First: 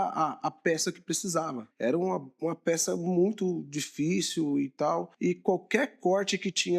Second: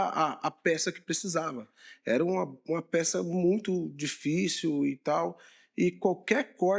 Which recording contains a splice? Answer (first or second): first